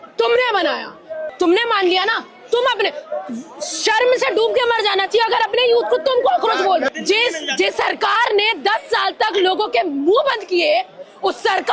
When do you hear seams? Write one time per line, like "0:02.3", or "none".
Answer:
0:01.2
0:06.9